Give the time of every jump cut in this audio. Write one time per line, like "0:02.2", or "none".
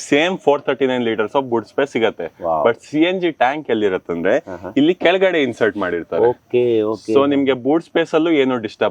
none